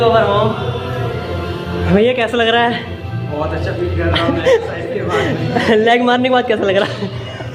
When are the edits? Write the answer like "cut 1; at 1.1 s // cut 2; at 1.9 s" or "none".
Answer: none